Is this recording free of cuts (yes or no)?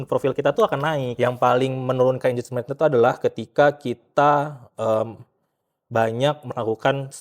no